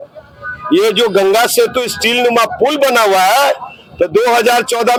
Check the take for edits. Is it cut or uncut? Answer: uncut